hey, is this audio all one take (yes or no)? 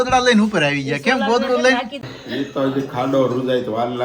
no